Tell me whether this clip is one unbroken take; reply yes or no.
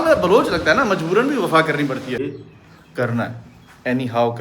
no